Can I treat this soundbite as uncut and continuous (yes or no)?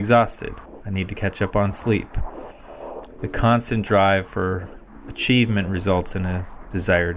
yes